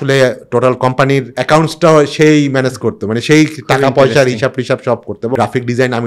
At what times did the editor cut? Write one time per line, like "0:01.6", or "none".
0:01.4
0:05.3